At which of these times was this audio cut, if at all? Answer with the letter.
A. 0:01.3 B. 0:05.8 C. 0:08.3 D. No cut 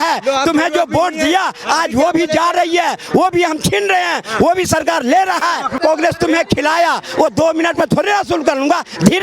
B